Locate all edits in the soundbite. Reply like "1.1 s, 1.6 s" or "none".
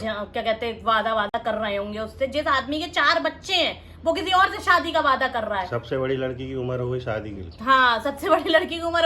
none